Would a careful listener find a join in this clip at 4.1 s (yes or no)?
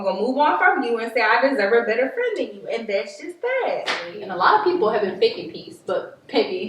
yes